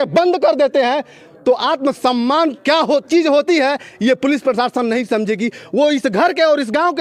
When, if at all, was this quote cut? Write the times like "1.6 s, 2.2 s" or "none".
none